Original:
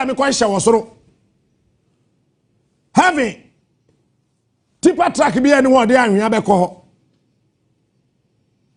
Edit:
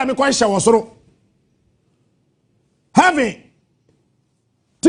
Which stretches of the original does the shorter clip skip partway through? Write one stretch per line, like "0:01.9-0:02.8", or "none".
none